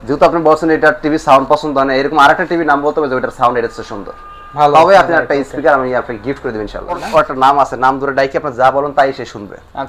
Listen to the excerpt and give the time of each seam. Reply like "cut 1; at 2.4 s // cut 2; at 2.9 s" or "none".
cut 1; at 7.0 s